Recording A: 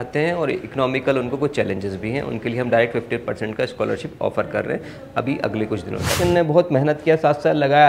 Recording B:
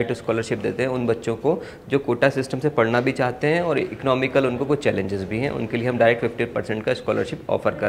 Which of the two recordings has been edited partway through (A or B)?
A